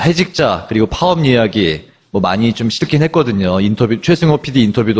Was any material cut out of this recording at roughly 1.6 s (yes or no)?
no